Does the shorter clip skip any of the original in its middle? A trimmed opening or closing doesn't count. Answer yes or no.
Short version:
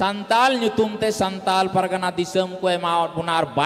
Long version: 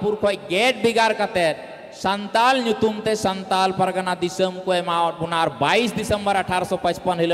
no